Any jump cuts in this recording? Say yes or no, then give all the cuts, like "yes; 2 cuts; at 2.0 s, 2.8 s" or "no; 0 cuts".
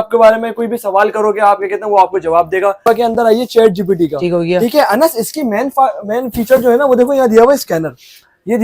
yes; 1 cut; at 2.8 s